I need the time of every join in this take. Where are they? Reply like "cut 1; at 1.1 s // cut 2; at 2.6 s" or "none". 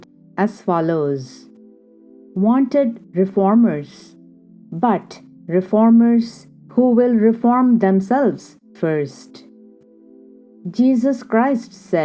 none